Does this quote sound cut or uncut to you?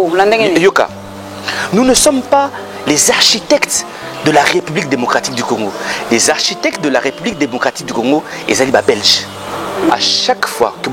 cut